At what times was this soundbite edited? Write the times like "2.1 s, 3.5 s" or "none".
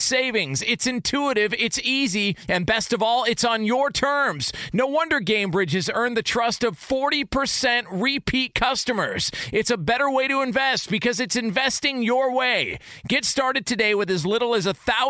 none